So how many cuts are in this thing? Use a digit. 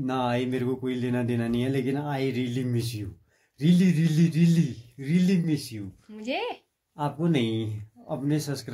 0